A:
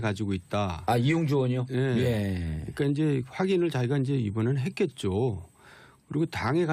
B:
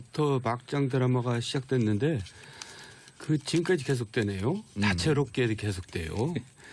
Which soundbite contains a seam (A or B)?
A